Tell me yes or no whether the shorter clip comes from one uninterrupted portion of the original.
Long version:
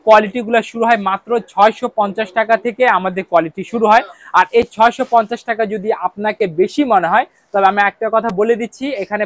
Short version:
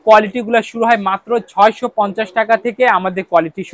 yes